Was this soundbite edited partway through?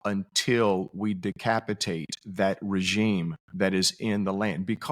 no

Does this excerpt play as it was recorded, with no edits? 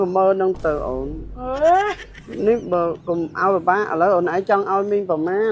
no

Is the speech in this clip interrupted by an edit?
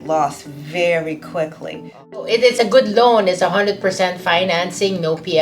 yes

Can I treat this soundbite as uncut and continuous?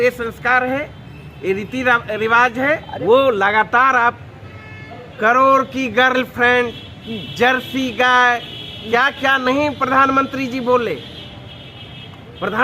no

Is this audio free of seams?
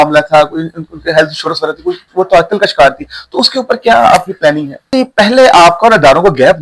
no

